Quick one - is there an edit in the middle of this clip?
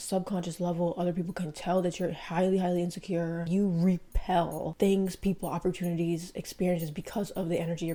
no; 0 cuts

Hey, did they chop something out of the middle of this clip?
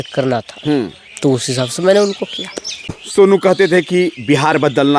yes; 1 cut; at 3.0 s

